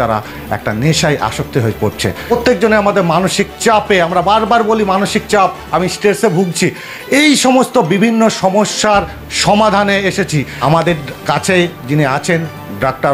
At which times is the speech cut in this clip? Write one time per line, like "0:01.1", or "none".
none

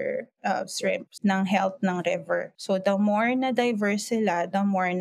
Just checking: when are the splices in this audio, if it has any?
0:01.1
0:02.5

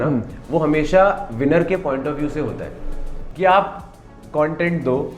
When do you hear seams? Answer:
0:03.2

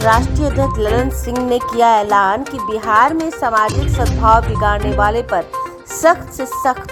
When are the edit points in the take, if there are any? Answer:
none

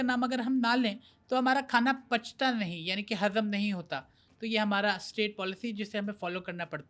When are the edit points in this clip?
none

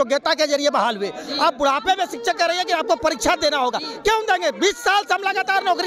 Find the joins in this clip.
none

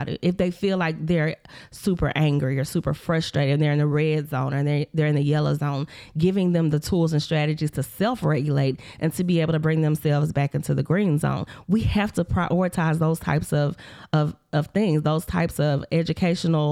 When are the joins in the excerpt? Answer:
none

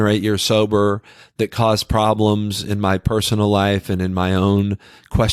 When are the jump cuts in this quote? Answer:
none

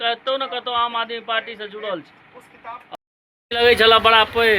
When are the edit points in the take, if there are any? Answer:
0:02.9

